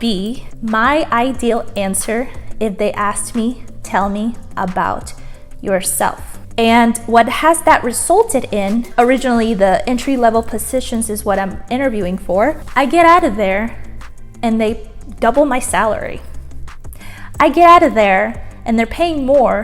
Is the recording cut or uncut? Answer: uncut